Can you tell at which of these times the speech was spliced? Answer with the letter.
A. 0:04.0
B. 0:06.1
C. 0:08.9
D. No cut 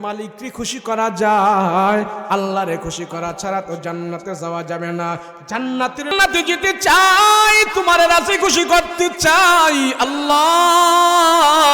B